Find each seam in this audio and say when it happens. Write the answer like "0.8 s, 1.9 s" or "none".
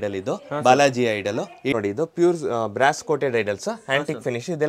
1.7 s